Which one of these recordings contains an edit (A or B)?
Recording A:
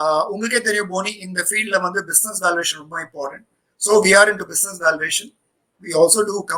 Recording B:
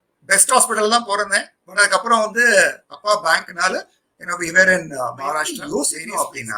B